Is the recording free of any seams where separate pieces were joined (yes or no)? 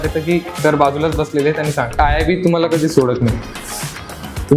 no